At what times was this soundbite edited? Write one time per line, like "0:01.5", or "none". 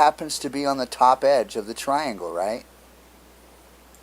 0:01.7